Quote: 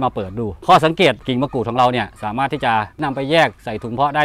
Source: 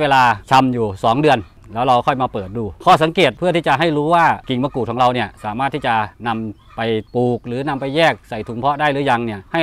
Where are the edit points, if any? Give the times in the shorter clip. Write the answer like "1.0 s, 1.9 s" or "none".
1.2 s, 3.0 s